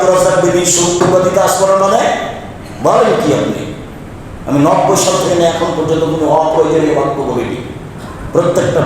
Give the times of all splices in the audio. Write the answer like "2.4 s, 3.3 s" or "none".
1.0 s